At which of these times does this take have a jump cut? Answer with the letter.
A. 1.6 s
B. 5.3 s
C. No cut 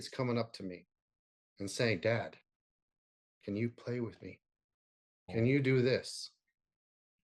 B